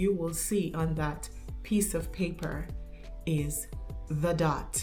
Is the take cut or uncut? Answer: uncut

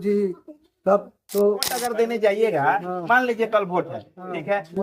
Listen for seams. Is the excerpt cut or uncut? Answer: cut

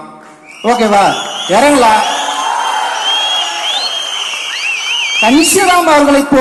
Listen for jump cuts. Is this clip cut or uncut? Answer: uncut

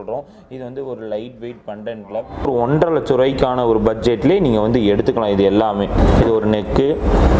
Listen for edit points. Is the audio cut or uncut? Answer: cut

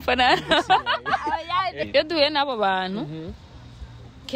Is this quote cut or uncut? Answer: cut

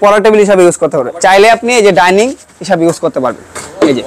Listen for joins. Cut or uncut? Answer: cut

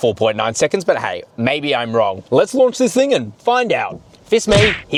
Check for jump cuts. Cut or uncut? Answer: uncut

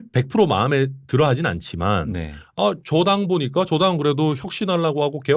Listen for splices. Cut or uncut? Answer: uncut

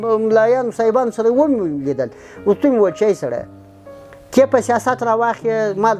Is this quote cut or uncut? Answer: uncut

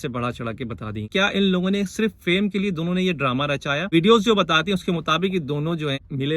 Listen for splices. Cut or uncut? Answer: cut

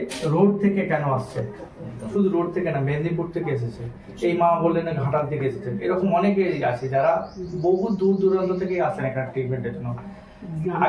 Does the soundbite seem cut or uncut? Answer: uncut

